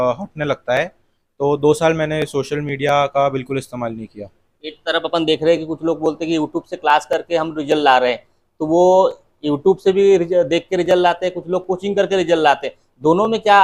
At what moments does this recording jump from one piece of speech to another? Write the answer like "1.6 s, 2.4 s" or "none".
none